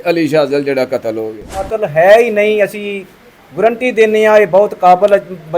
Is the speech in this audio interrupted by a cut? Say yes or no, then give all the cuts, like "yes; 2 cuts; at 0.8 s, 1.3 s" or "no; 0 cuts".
yes; 1 cut; at 1.7 s